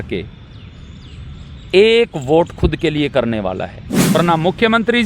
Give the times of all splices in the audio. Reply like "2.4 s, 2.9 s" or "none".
4.2 s